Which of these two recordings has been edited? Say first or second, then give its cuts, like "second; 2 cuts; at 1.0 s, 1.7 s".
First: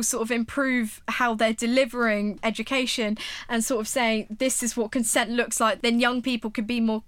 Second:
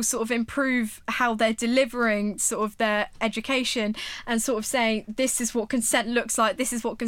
first; 2 cuts; at 2.4 s, 5.8 s